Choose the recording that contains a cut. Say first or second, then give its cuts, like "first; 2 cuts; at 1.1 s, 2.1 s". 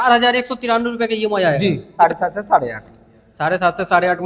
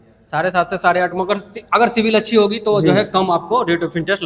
first; 1 cut; at 1.9 s